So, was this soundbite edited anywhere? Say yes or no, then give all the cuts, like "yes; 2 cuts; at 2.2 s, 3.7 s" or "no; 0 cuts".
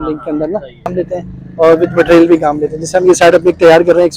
yes; 1 cut; at 0.9 s